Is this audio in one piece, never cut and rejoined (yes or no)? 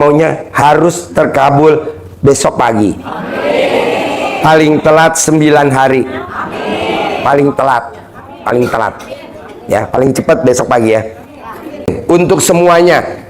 no